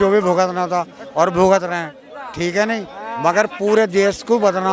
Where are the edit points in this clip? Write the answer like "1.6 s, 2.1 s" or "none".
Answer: none